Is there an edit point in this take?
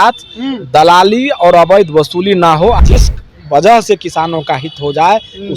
yes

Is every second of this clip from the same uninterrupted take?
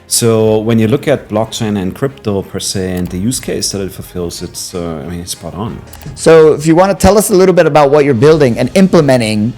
no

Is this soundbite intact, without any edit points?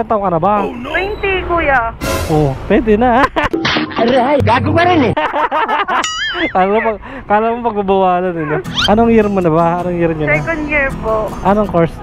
yes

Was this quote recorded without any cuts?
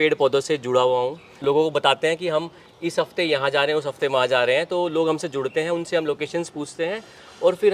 yes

